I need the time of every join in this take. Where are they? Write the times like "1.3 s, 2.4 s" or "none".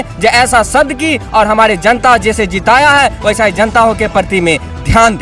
none